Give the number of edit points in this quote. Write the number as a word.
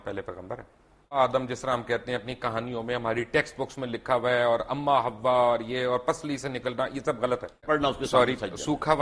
two